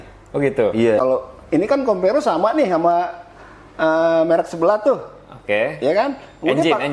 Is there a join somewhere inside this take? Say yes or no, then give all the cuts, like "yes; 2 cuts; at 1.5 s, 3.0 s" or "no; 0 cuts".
yes; 1 cut; at 1.0 s